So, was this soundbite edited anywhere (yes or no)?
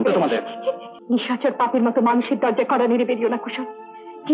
yes